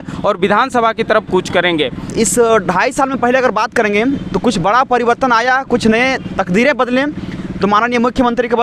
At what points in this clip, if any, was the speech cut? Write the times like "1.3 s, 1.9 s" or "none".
2.1 s